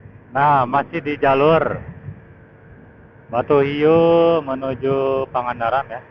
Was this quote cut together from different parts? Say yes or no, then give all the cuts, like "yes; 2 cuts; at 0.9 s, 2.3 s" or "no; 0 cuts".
no; 0 cuts